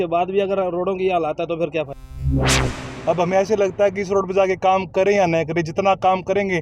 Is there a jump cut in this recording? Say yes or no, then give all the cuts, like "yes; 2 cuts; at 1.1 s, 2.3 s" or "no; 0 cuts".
yes; 1 cut; at 2.4 s